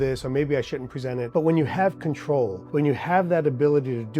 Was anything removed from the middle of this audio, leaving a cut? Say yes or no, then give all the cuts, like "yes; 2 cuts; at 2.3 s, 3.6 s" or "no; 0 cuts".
yes; 2 cuts; at 1.3 s, 2.6 s